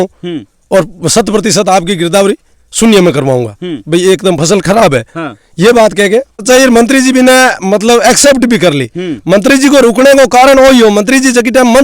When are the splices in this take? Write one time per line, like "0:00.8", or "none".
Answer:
0:06.4